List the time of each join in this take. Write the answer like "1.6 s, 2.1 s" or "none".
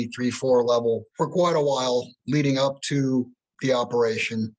1.1 s, 2.2 s